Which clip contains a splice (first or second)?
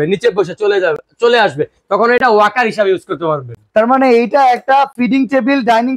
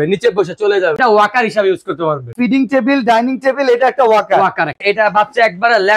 second